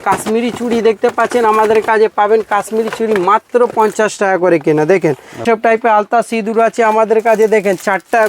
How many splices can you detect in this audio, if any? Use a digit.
1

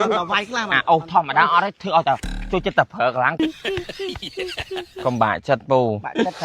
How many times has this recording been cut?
1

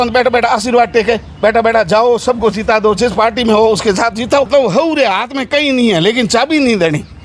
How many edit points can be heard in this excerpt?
1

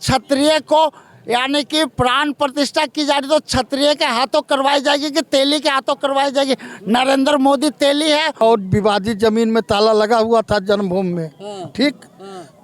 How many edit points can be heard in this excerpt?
1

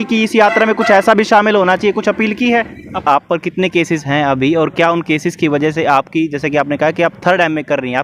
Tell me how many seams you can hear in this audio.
1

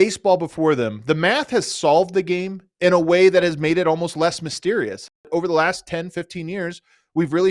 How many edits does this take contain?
1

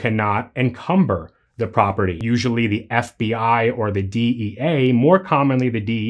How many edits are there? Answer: 1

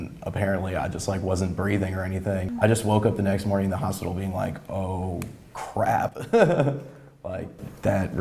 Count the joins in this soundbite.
1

